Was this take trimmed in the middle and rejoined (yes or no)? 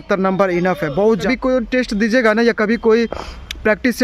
yes